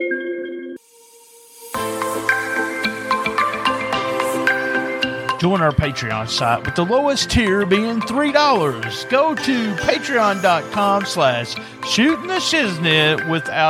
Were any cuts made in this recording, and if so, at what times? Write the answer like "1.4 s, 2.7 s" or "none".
0.9 s